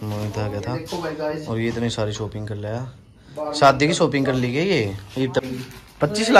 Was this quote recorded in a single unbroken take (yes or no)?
no